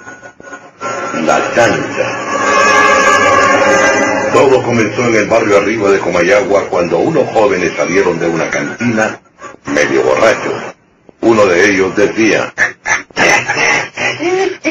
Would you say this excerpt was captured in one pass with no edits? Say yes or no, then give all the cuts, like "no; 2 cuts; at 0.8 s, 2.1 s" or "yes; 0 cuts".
yes; 0 cuts